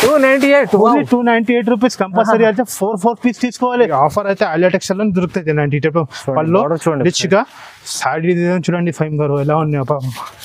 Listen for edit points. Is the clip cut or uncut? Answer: cut